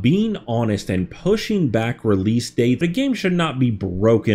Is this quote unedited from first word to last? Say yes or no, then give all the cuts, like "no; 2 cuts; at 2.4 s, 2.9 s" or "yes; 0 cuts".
no; 1 cut; at 2.8 s